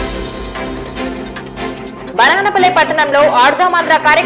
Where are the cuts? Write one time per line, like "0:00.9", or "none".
none